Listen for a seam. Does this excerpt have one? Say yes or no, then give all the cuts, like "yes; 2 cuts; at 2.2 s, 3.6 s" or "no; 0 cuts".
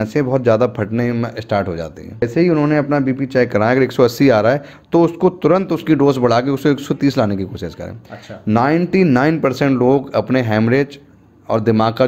yes; 1 cut; at 2.2 s